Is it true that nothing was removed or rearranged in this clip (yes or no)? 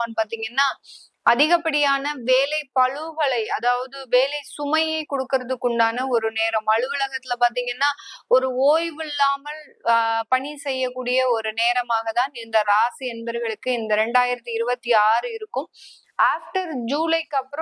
yes